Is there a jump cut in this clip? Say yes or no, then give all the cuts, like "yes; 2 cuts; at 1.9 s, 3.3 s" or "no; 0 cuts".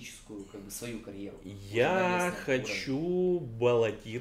no; 0 cuts